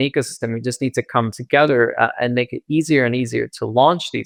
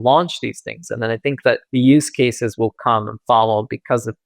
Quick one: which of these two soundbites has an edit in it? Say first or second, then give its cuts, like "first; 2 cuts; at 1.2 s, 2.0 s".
second; 1 cut; at 1.6 s